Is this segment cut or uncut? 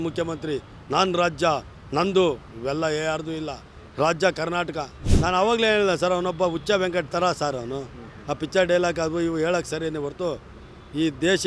cut